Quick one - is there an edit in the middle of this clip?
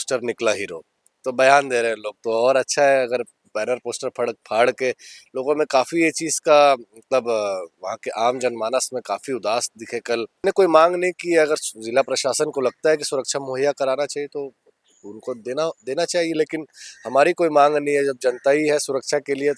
yes; 1 cut; at 10.4 s

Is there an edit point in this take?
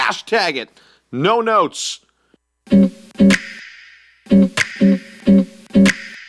yes; 2 cuts; at 2.5 s, 5.1 s

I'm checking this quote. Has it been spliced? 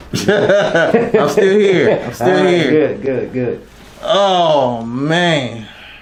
no; 0 cuts

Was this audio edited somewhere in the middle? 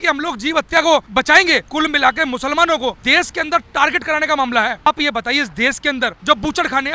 yes; 4 cuts; at 1.2 s, 3.0 s, 4.9 s, 6.2 s

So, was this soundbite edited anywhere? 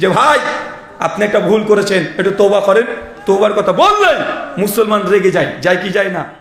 no; 0 cuts

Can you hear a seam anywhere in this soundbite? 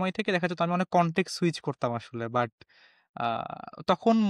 no; 0 cuts

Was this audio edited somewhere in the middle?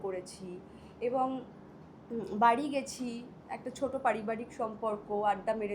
no; 0 cuts

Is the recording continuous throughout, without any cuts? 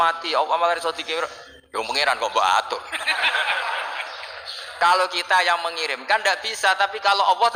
yes; 0 cuts

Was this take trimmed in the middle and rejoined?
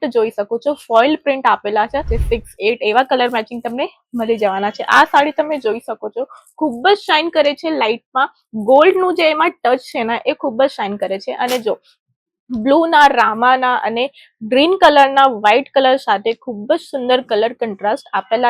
yes; 1 cut; at 2.1 s

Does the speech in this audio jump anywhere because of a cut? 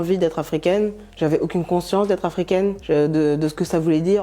no; 0 cuts

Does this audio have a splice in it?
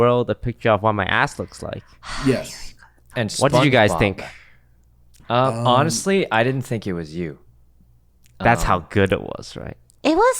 no; 0 cuts

